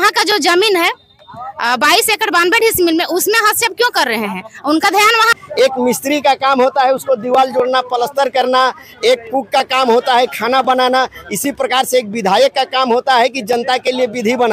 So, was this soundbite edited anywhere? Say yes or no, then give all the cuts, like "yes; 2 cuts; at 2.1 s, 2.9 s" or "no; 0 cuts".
yes; 1 cut; at 5.3 s